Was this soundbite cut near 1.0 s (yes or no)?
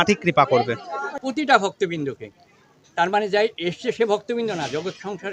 yes